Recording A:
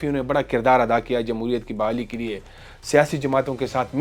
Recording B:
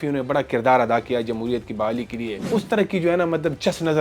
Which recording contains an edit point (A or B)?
B